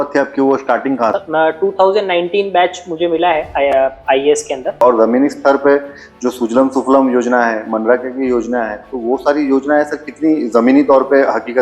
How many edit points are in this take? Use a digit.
2